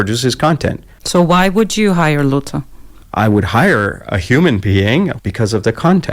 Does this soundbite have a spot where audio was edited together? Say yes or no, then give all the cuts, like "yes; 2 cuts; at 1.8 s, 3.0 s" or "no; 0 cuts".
yes; 2 cuts; at 0.9 s, 5.1 s